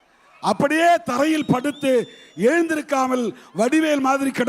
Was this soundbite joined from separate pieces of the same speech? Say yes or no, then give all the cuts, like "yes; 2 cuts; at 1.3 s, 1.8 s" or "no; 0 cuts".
no; 0 cuts